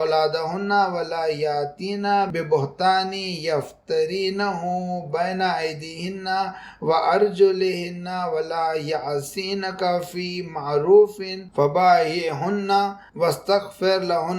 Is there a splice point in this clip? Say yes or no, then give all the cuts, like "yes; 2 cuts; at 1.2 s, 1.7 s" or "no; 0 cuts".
no; 0 cuts